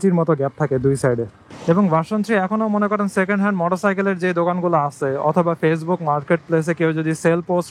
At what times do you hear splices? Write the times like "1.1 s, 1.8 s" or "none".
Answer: 1.4 s